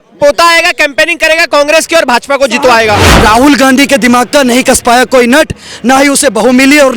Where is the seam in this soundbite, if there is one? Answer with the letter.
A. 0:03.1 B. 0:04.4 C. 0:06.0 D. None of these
A